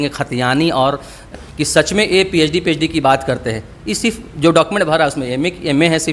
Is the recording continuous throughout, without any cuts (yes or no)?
no